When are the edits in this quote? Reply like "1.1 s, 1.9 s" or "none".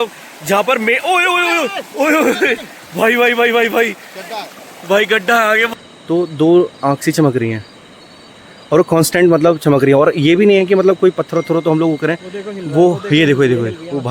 5.7 s